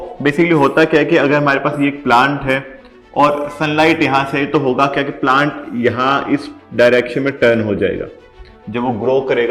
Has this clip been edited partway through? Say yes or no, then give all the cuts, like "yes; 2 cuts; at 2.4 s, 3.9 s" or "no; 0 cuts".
no; 0 cuts